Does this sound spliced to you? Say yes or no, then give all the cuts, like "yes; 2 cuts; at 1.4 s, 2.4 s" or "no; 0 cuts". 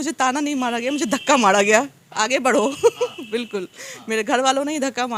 no; 0 cuts